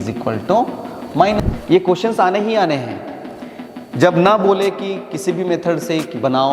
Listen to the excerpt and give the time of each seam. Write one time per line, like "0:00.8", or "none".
0:01.4